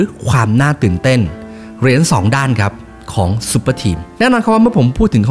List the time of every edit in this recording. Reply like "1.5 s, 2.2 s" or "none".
none